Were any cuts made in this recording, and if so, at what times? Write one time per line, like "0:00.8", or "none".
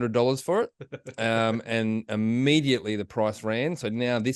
none